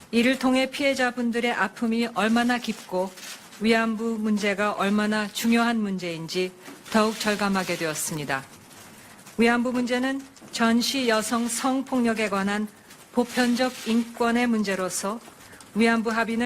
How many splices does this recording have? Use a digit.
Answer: 1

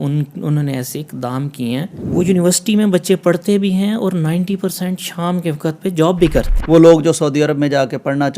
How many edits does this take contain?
2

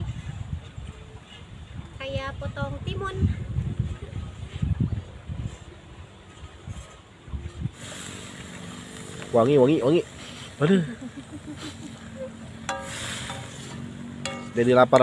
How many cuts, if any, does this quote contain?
1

